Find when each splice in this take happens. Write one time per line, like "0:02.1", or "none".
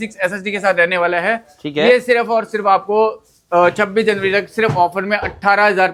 none